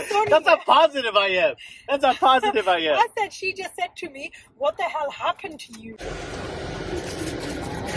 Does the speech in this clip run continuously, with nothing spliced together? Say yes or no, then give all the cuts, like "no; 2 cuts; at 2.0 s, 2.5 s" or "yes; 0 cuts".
no; 1 cut; at 5.9 s